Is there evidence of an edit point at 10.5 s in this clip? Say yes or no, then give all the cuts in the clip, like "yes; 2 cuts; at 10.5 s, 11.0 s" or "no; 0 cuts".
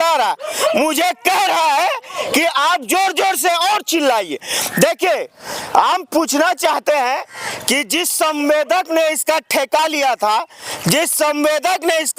no; 0 cuts